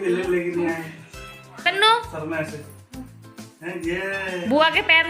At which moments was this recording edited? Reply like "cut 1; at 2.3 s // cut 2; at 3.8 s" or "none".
cut 1; at 1.6 s